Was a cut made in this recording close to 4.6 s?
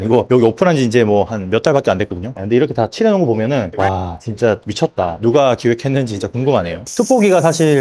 no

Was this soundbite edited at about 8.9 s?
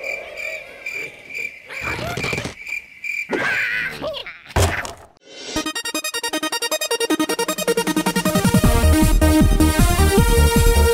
no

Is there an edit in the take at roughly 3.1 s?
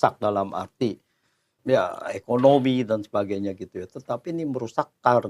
no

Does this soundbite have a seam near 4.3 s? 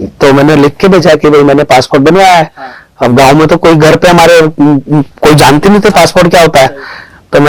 no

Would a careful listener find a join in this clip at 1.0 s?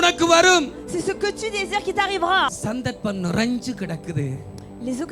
no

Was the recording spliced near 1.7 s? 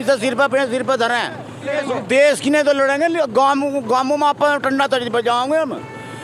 yes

